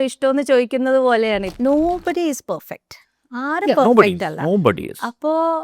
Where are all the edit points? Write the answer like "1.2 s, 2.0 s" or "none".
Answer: 1.5 s